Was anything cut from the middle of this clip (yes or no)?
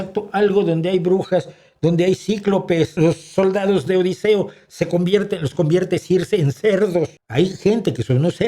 yes